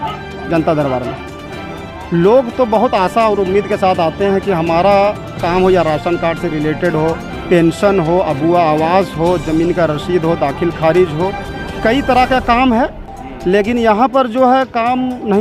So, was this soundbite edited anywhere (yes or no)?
no